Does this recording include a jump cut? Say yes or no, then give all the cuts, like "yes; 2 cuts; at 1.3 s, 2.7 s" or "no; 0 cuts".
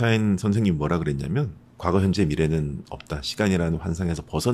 no; 0 cuts